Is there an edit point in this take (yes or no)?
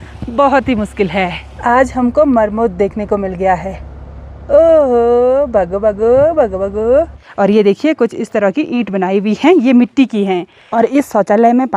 yes